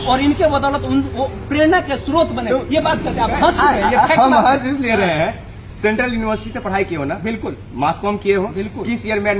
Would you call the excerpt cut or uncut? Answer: uncut